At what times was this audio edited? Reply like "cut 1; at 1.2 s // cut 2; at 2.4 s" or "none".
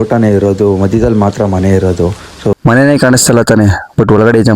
cut 1; at 2.5 s

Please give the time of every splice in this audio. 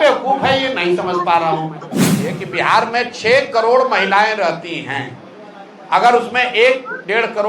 cut 1; at 2.1 s

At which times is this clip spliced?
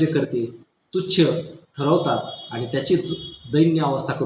none

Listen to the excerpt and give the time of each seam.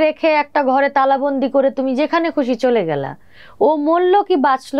none

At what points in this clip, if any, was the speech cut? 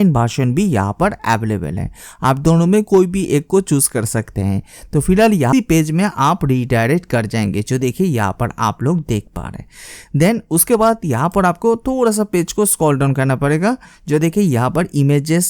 cut 1; at 5.5 s

